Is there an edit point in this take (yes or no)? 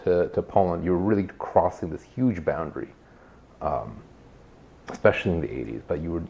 no